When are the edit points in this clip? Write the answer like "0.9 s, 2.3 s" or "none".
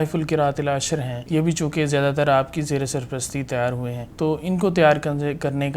1.2 s, 4.0 s